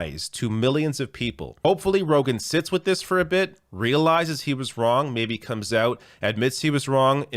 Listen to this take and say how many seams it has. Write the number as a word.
one